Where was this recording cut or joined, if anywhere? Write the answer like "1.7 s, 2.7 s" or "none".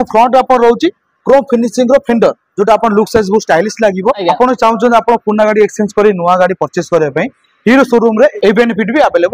4.2 s, 8.3 s

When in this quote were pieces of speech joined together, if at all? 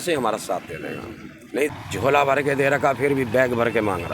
1.7 s

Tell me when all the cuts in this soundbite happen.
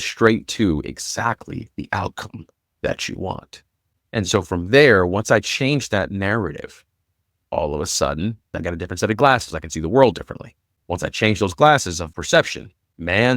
8.5 s, 12.1 s

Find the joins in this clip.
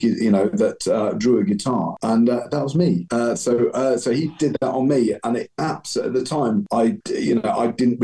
2.0 s, 3.1 s, 6.8 s

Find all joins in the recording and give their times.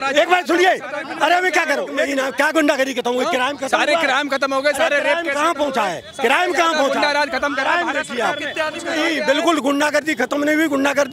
2.1 s, 8.8 s

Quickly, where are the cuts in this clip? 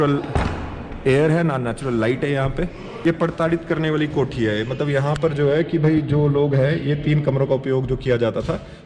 none

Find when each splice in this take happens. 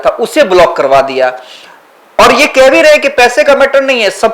none

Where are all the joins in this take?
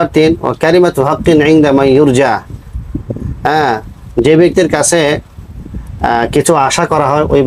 none

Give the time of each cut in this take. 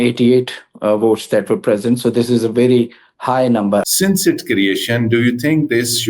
3.9 s

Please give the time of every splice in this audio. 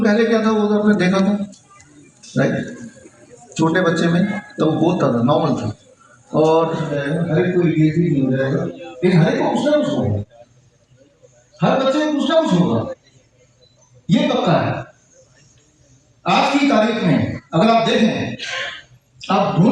6.8 s

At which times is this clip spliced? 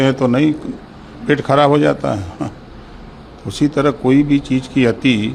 none

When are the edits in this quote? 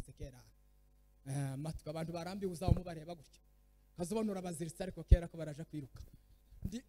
none

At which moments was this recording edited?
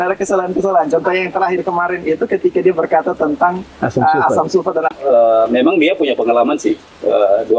5.0 s

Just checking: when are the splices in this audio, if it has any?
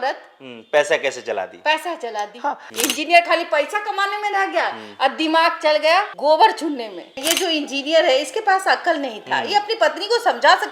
2.6 s, 7.3 s

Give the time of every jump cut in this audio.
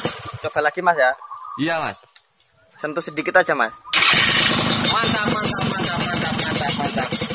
none

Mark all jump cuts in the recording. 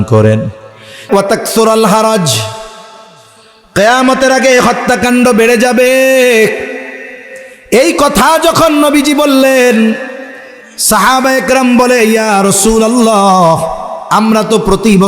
1.1 s

